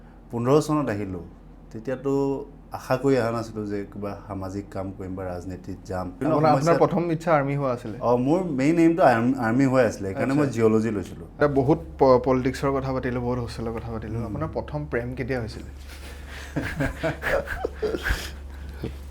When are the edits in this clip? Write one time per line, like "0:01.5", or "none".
0:06.2
0:11.4